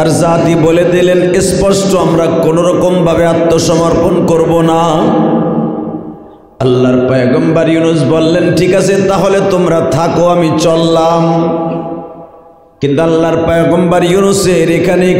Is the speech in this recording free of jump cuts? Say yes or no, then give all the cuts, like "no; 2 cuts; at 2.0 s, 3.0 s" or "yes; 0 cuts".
yes; 0 cuts